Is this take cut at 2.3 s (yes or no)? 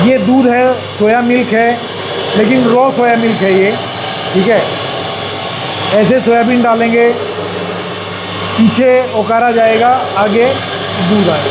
no